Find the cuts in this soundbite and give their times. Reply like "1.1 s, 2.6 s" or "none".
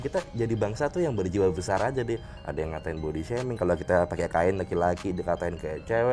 none